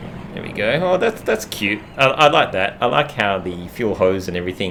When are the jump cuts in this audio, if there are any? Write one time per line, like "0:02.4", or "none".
none